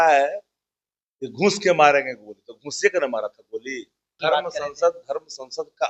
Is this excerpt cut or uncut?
cut